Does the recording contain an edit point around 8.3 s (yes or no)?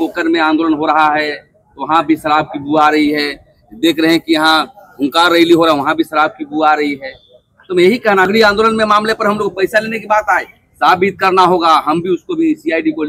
yes